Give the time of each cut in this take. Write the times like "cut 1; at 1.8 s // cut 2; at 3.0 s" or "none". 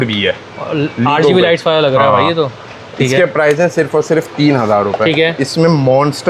none